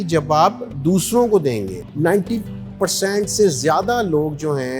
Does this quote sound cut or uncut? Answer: cut